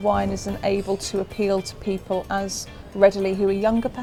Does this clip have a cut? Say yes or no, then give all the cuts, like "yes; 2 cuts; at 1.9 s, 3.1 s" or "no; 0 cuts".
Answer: no; 0 cuts